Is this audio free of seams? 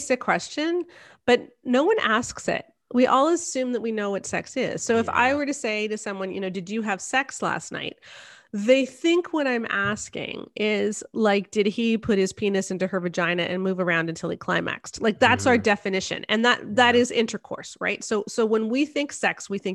yes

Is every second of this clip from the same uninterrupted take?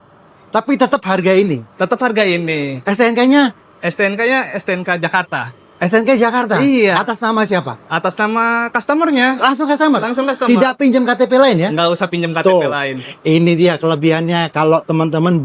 yes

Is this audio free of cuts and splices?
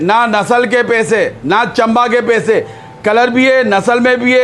yes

